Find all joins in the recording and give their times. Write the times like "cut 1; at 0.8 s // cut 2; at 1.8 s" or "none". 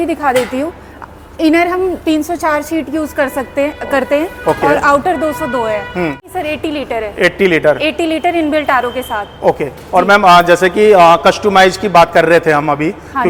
none